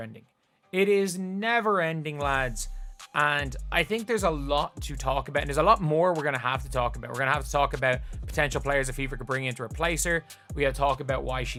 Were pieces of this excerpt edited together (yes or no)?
no